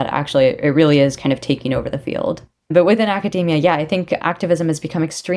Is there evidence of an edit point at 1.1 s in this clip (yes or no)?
no